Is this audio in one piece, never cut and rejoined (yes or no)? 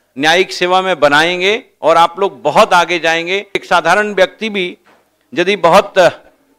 no